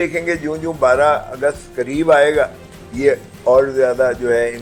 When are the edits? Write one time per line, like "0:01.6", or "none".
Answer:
none